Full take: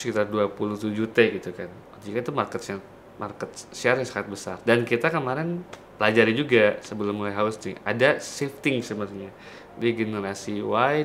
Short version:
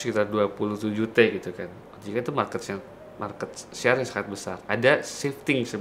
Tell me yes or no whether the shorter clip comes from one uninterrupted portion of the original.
no